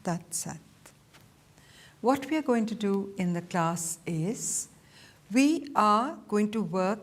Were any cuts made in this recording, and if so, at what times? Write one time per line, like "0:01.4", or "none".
none